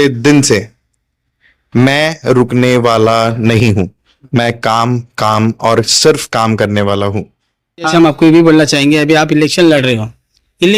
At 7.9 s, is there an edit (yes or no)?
yes